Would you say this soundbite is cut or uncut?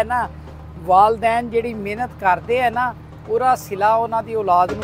uncut